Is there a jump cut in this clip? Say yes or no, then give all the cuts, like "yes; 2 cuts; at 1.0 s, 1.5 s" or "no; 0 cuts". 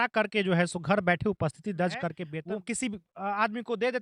yes; 1 cut; at 2.3 s